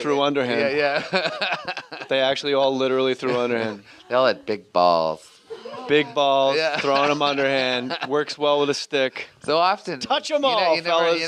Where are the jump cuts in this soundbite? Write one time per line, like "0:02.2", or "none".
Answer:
none